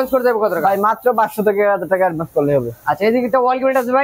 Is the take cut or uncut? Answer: uncut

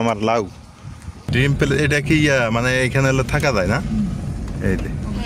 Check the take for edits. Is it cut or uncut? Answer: cut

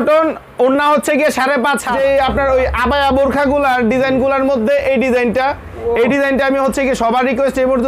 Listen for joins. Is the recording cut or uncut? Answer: cut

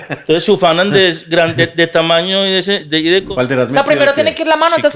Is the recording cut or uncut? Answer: cut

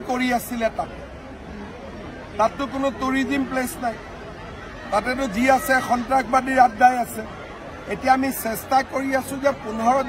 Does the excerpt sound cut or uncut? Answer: uncut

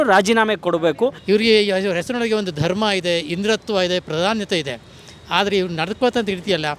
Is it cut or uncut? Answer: cut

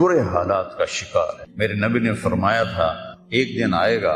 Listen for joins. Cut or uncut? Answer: cut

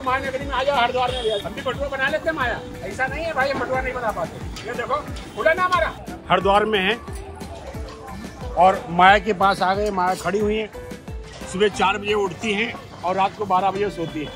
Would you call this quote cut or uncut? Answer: cut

